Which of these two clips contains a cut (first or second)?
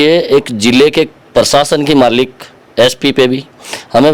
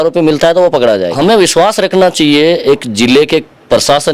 second